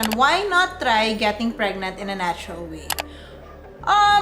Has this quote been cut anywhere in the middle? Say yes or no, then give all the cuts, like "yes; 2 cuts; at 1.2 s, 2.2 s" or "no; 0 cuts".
no; 0 cuts